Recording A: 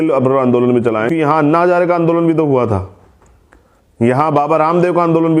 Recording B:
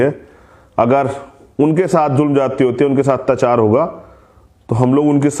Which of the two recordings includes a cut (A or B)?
A